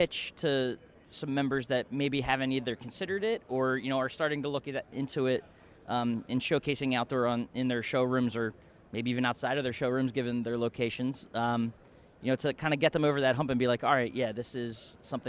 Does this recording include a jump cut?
no; 0 cuts

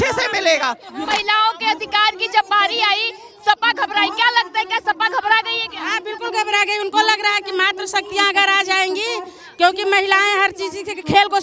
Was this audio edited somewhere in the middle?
yes; 1 cut; at 1.0 s

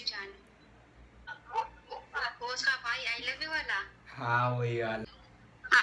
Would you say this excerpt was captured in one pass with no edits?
no; 2 cuts; at 1.4 s, 5.0 s

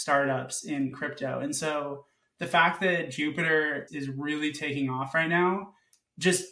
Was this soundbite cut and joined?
yes; 2 cuts; at 0.9 s, 3.9 s

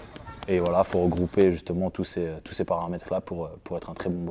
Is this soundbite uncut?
no; 1 cut; at 1.0 s

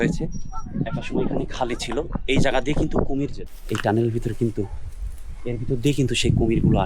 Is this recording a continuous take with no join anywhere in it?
no; 1 cut; at 3.4 s

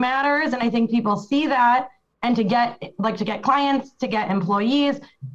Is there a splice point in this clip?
no; 0 cuts

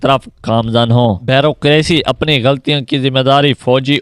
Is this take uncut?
no; 1 cut; at 1.2 s

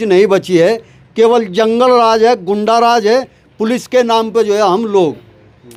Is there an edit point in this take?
no; 0 cuts

